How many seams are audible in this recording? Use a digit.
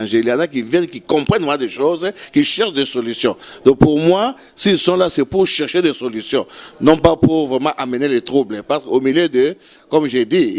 0